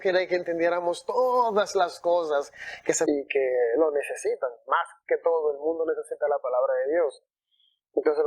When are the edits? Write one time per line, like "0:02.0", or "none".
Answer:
0:03.1